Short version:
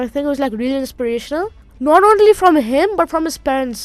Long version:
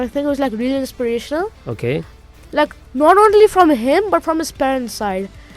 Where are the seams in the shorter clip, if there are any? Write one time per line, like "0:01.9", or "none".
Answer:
0:01.7